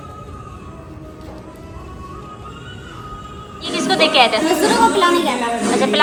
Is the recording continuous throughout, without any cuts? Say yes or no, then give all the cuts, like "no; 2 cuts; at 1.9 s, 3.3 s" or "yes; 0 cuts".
yes; 0 cuts